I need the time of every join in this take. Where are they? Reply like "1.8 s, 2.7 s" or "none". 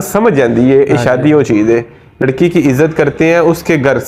2.2 s